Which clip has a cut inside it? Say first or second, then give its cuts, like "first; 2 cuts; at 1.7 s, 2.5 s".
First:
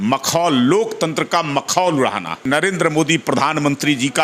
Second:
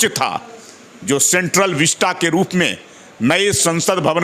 first; 1 cut; at 2.5 s